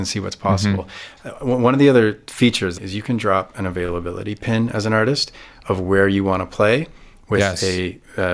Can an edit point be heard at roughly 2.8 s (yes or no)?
yes